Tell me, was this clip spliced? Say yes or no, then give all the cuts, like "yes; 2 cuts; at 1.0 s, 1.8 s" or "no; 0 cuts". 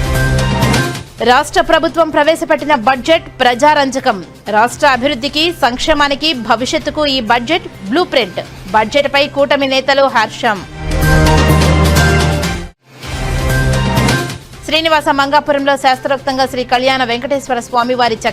yes; 1 cut; at 1.0 s